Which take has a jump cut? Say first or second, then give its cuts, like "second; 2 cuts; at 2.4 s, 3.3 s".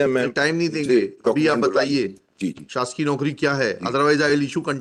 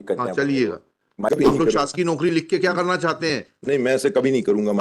second; 1 cut; at 1.3 s